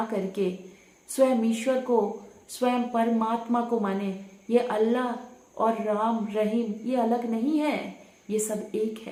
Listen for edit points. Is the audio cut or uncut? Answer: uncut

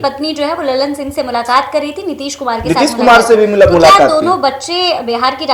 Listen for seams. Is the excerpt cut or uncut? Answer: uncut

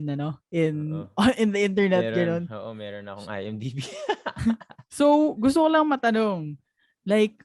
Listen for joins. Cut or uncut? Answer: uncut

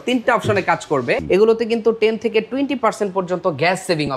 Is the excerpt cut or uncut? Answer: cut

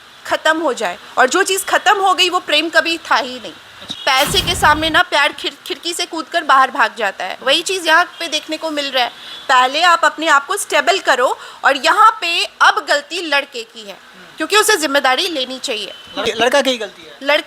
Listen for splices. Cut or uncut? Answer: cut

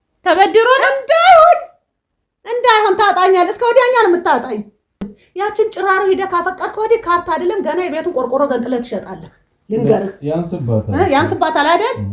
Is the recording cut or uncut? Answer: cut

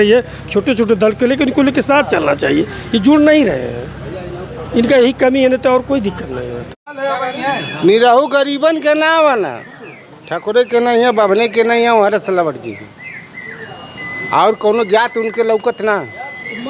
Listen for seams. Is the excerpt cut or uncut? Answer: cut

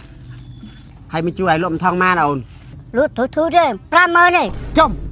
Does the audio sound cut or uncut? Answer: uncut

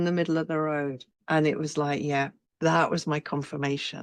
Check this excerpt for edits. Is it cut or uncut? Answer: cut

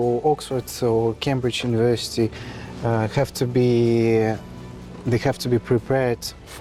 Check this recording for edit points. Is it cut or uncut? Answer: uncut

